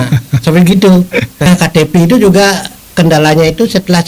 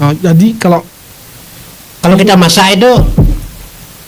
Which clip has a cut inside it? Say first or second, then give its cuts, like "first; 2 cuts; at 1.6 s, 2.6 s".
first; 1 cut; at 1.5 s